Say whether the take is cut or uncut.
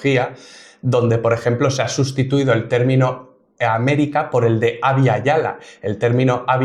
uncut